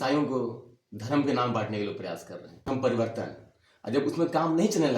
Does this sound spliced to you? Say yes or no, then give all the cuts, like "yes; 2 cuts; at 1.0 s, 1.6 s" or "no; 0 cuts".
yes; 1 cut; at 2.5 s